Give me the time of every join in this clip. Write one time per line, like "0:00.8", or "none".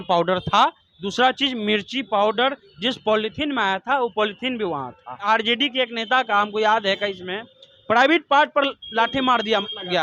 0:05.2

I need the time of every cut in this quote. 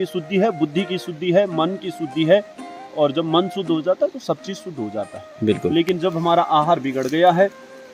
none

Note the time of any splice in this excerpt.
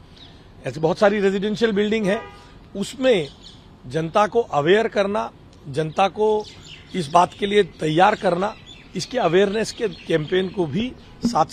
none

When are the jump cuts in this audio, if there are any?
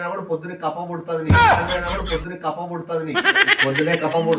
none

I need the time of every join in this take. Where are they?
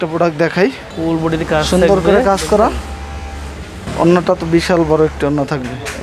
none

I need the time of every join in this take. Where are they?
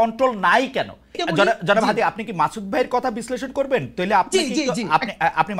0:01.2

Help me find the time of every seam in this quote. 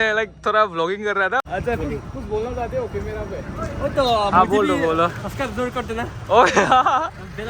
0:01.5

